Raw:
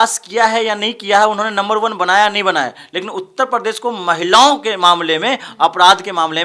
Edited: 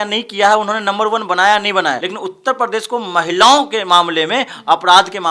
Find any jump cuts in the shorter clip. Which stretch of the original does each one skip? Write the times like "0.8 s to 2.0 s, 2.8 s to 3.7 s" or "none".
2.8 s to 3.0 s